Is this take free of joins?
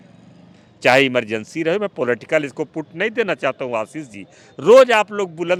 yes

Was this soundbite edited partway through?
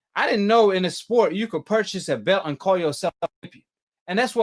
no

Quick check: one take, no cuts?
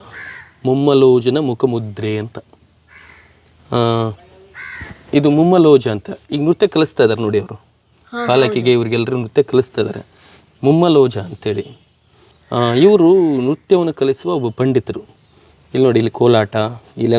yes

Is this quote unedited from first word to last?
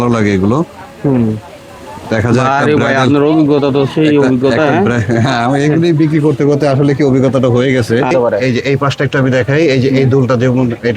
no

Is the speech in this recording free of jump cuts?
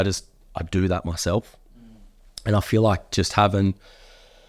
yes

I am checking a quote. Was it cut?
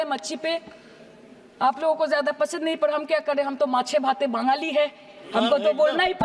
no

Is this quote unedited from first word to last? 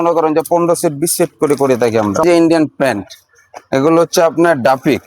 no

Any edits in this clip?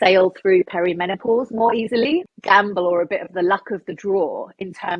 yes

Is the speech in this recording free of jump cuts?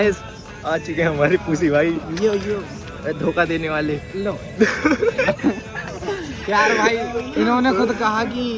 yes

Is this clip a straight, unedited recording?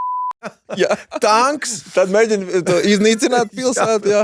yes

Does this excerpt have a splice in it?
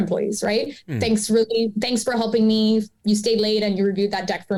no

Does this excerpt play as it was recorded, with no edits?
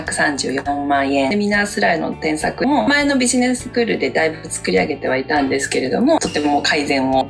no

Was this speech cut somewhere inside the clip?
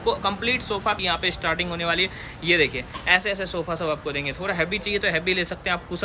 yes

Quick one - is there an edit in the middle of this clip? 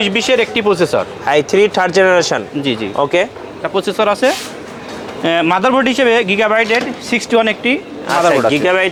no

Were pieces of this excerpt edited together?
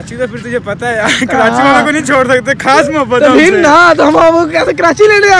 yes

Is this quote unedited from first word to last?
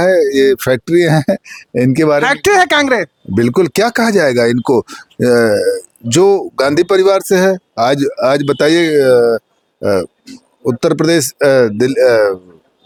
yes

